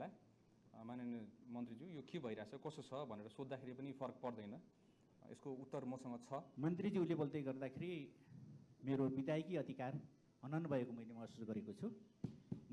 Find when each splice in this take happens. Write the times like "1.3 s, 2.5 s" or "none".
6.5 s